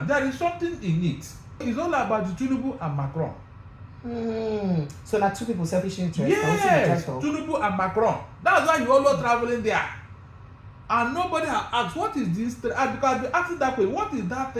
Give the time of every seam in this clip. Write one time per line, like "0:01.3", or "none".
0:01.6